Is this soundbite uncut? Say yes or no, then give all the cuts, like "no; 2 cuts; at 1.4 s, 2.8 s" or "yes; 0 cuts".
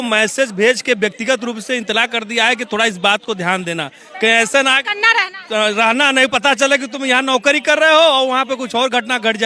yes; 0 cuts